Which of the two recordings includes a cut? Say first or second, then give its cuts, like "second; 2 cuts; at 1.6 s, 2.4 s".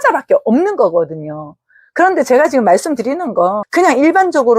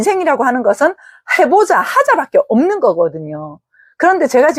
first; 1 cut; at 3.6 s